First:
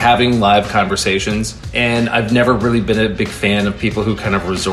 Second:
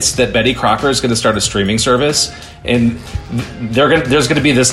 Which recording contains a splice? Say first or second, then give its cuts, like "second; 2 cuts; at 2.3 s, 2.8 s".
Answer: first; 1 cut; at 1.6 s